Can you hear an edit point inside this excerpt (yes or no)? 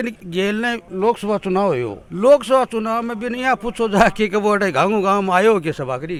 no